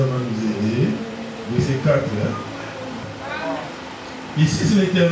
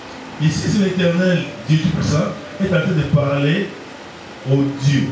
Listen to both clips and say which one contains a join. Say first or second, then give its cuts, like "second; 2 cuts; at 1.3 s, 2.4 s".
first; 1 cut; at 3.0 s